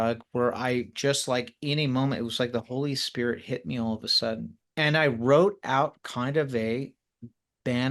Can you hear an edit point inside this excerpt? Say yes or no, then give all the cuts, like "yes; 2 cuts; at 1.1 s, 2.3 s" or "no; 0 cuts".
yes; 1 cut; at 4.6 s